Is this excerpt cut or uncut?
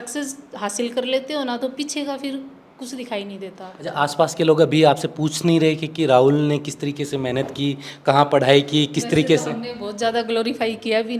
uncut